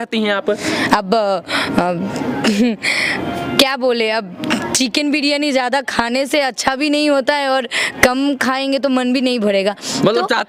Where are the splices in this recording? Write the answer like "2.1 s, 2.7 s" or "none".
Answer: none